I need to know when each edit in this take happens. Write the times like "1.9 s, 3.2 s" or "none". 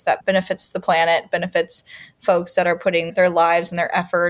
none